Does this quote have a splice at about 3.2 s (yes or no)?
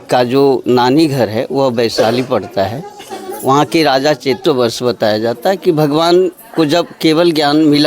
no